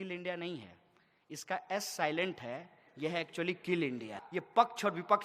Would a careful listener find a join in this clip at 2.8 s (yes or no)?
no